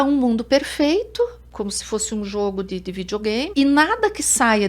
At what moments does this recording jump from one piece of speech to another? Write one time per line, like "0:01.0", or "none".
0:01.4
0:03.5

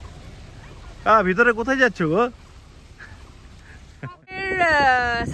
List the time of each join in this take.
0:04.3

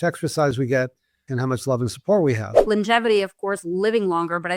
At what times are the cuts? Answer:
0:01.3
0:02.6

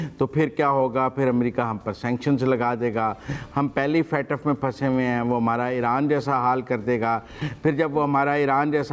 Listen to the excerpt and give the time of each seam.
none

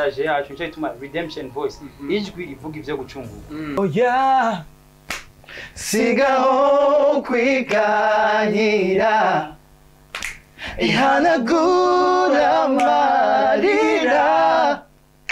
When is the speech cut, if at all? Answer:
0:03.8

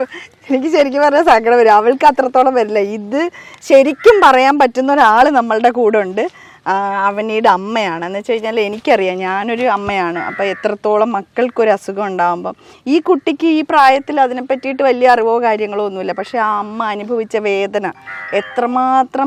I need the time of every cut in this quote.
none

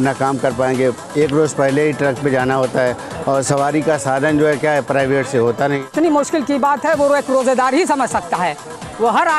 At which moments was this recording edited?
0:05.9

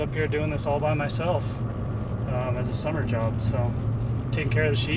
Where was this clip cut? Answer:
none

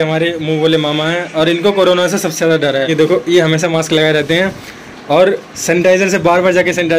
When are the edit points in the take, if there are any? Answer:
0:02.9

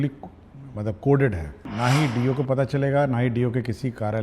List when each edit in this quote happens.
0:01.7

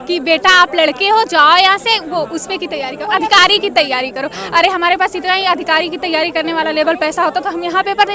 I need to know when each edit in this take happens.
none

